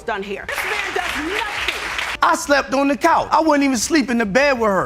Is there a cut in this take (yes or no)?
yes